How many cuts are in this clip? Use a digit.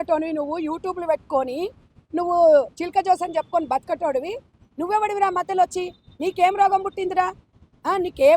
1